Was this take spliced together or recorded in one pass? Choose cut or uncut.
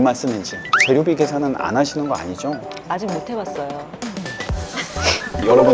uncut